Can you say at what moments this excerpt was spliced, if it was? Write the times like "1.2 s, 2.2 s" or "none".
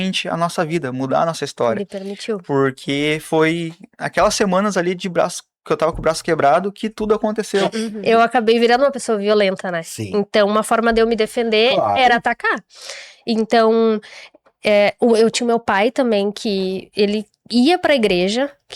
7.9 s